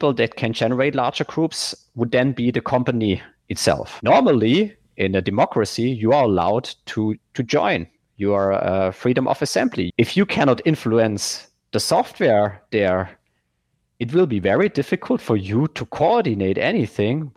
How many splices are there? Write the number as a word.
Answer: two